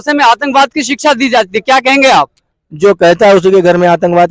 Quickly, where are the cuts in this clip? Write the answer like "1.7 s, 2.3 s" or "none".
none